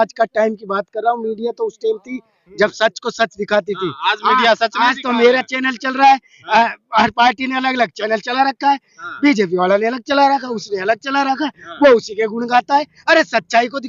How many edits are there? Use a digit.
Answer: 0